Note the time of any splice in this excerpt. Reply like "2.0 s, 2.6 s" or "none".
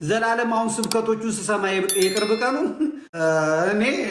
3.1 s